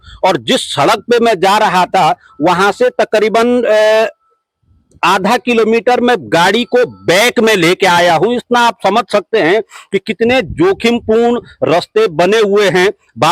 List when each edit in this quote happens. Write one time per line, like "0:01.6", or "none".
none